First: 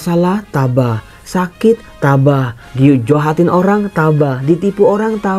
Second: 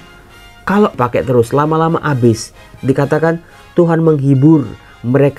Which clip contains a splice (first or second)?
second